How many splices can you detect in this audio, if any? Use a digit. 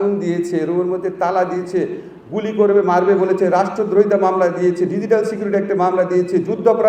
0